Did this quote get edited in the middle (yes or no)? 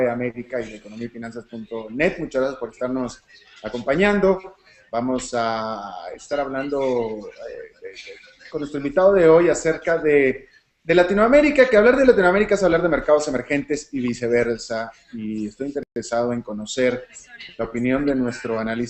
no